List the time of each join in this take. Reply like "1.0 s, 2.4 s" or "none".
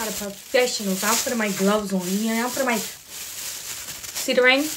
none

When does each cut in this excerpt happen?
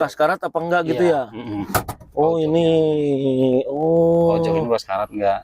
none

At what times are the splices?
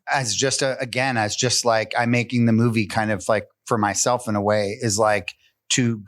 none

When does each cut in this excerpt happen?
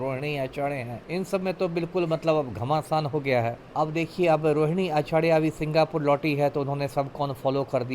1.0 s, 3.6 s

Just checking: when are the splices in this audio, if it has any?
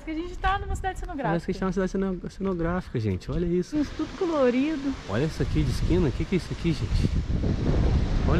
3.7 s

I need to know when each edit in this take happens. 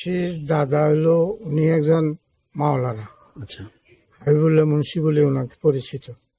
none

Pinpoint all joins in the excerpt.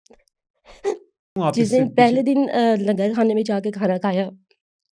1.4 s

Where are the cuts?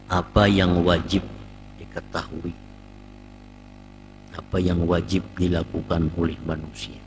none

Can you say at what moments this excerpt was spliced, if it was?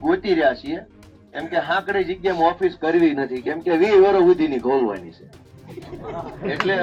none

